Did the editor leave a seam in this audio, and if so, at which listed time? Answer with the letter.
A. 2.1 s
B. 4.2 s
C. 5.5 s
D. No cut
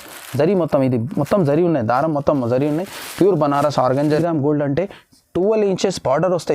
B